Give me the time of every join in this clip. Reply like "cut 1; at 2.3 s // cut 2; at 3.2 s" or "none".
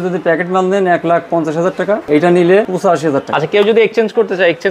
cut 1; at 2.0 s // cut 2; at 3.2 s